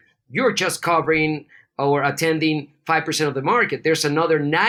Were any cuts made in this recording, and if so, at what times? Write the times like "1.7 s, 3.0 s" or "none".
none